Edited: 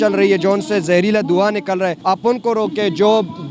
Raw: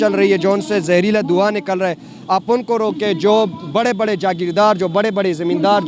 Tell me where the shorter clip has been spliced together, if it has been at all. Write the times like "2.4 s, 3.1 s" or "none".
2.0 s

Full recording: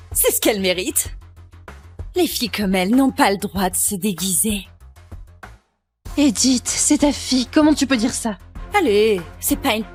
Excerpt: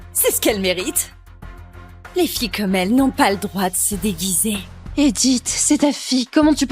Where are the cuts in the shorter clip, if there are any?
4.8 s

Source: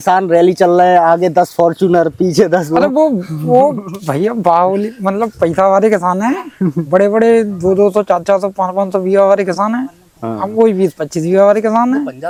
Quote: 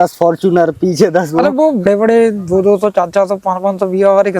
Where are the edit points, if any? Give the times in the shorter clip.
1.9 s

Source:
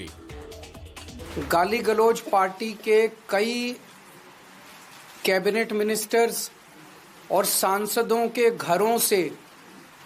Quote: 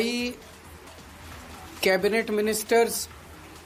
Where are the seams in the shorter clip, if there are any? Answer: none

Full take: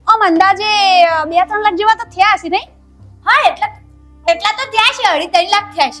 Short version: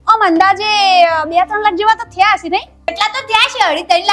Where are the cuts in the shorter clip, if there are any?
2.9 s

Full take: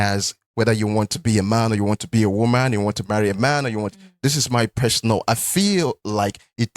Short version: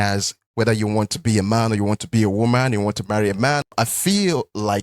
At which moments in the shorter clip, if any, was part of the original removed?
3.7 s

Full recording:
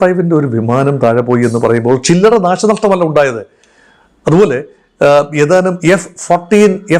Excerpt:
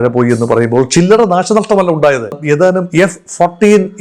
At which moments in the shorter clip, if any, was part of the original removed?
2.4 s

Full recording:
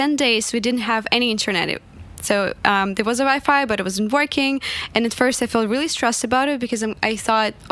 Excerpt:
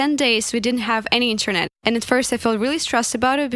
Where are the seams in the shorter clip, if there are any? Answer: 1.7 s

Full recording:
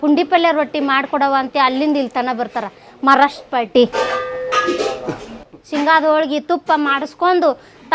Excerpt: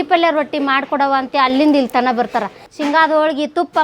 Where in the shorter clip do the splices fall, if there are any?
2.6 s

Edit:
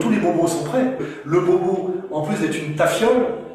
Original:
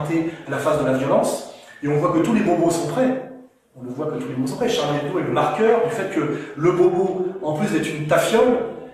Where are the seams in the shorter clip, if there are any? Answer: 1.1 s

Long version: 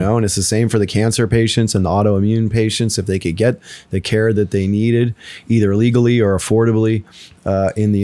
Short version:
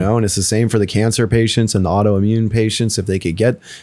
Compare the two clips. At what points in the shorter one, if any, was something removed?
none

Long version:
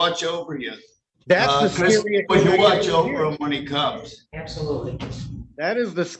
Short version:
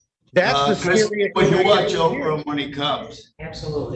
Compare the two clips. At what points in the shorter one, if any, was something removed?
none

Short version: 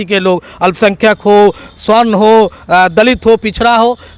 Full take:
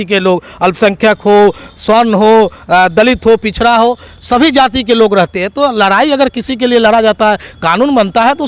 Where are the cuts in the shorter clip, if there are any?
none

